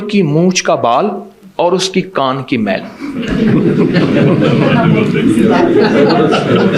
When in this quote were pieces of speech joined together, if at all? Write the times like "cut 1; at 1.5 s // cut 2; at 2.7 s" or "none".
none